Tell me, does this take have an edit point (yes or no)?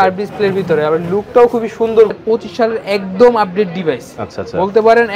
yes